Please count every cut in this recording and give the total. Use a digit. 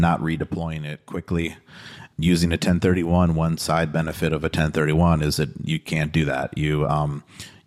0